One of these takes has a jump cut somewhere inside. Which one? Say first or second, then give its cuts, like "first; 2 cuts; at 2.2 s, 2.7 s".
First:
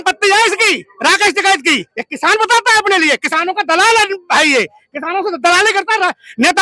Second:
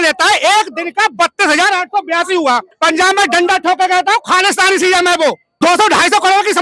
second; 2 cuts; at 2.7 s, 5.5 s